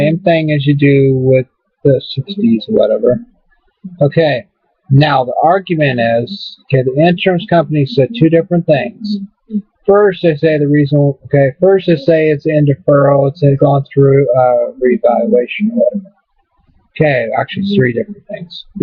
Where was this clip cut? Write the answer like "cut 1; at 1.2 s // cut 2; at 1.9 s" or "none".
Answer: cut 1; at 8.0 s